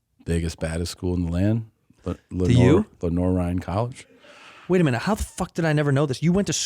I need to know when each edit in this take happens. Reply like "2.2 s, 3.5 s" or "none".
4.5 s